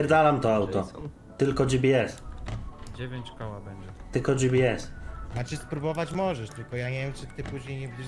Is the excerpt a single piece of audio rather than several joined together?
yes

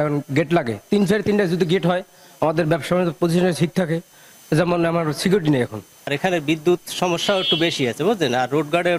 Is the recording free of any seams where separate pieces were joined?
yes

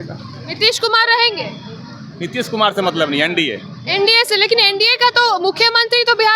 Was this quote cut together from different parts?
no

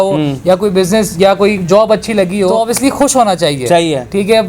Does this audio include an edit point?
yes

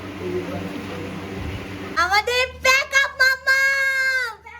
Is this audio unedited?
yes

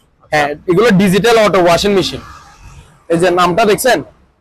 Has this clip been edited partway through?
no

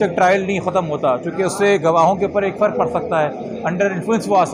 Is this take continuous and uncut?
yes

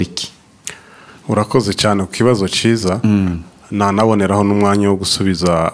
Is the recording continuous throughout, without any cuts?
yes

